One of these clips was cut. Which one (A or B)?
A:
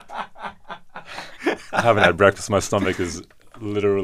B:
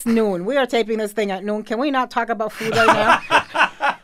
A